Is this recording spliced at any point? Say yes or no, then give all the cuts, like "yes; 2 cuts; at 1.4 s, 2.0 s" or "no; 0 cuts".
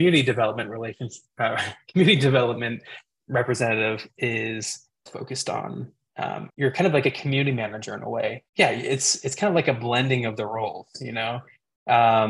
no; 0 cuts